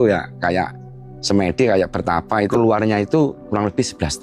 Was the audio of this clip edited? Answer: yes; 1 cut; at 2.5 s

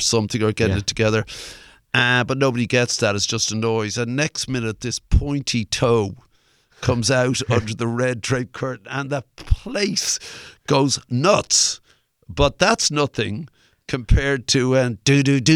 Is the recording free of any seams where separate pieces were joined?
yes; 0 cuts

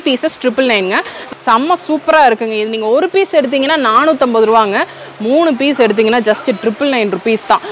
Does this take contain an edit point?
yes; 1 cut; at 1.2 s

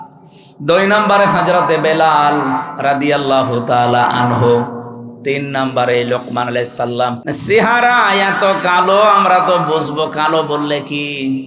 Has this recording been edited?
yes; 1 cut; at 7.2 s

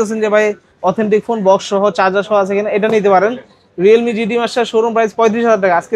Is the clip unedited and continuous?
yes; 0 cuts

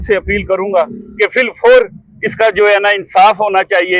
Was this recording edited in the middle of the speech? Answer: no; 0 cuts

